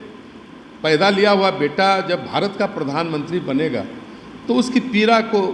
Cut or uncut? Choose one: uncut